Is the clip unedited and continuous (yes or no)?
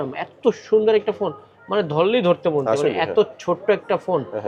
yes